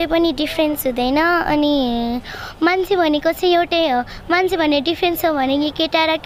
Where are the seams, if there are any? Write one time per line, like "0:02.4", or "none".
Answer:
none